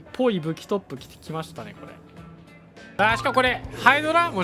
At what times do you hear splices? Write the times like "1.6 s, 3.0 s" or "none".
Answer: 3.0 s